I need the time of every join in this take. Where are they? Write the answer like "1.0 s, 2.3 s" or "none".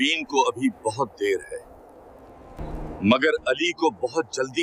2.6 s